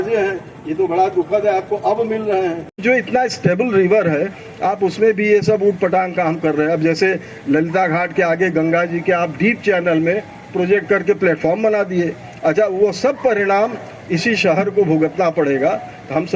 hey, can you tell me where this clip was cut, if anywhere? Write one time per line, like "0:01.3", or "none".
0:02.7